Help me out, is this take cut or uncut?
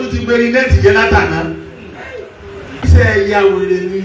cut